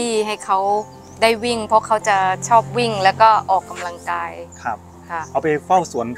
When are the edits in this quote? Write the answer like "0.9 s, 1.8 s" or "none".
none